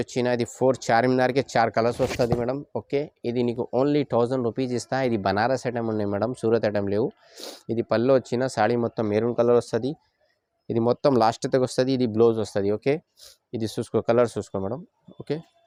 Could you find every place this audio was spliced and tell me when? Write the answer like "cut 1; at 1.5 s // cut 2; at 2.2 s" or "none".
none

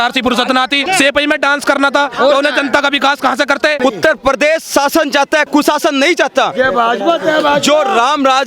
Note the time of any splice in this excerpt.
cut 1; at 3.8 s

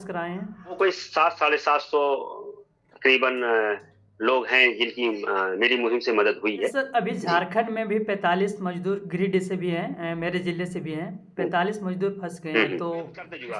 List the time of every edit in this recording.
cut 1; at 0.8 s // cut 2; at 6.7 s

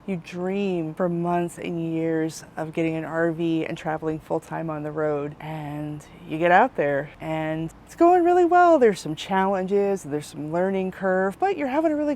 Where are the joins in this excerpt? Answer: cut 1; at 0.9 s

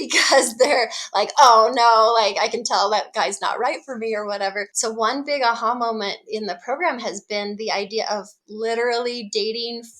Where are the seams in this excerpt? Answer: cut 1; at 4.7 s

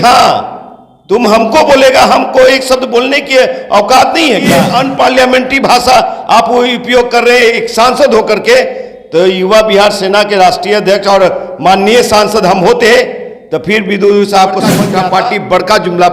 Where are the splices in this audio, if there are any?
cut 1; at 4.6 s // cut 2; at 14.8 s

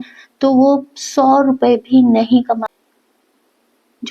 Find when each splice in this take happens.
cut 1; at 2.8 s

